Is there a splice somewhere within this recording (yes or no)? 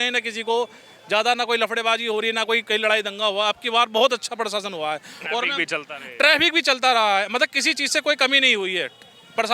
no